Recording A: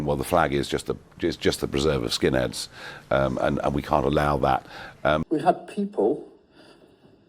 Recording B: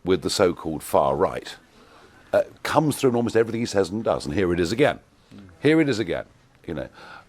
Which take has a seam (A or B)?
A